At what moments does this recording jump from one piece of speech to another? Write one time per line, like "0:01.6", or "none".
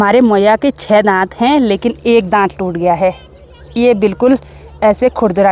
none